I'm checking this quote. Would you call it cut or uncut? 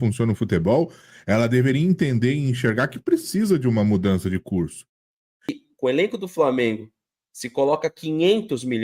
cut